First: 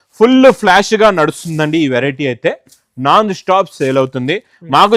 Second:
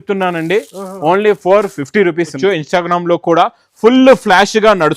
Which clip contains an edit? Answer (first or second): second